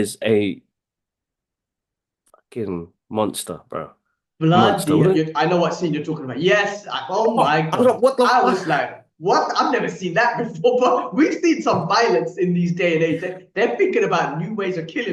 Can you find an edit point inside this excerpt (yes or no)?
no